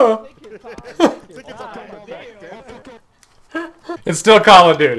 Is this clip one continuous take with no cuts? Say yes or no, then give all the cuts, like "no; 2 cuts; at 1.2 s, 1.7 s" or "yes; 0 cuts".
no; 1 cut; at 3.9 s